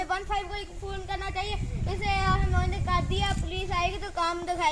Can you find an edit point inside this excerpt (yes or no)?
no